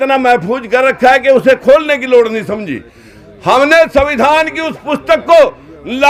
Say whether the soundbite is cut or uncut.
uncut